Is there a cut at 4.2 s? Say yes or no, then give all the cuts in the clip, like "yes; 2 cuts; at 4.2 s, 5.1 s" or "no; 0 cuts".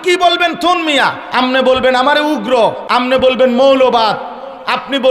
no; 2 cuts; at 1.2 s, 2.8 s